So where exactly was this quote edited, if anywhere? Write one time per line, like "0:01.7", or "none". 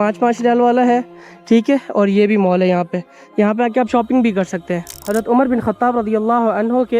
0:05.0